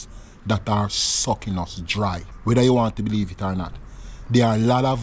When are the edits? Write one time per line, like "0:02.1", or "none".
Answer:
0:02.3